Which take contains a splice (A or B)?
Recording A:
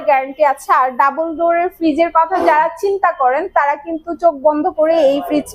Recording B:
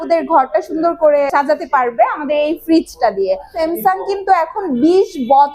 B